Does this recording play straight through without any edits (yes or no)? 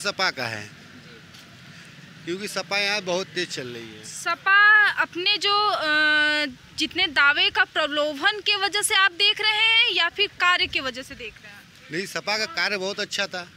yes